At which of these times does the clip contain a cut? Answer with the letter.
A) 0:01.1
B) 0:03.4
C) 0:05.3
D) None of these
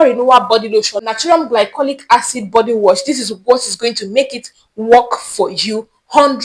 A